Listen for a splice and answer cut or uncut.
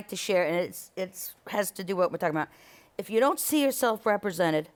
uncut